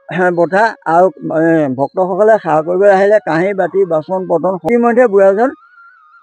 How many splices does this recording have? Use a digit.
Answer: 1